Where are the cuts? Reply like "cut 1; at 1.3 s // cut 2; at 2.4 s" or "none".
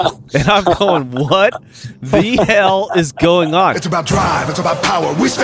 cut 1; at 3.9 s